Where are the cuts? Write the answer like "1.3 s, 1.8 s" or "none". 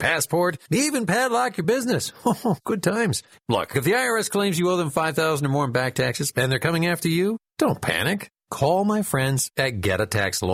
none